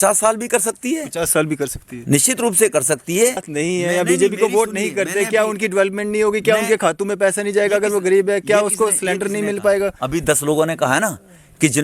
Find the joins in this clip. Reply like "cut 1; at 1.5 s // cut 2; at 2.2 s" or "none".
cut 1; at 3.5 s